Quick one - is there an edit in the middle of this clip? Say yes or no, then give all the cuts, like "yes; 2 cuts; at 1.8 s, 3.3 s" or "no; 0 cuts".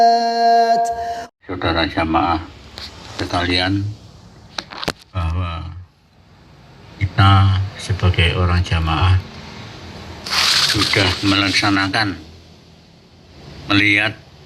yes; 1 cut; at 1.2 s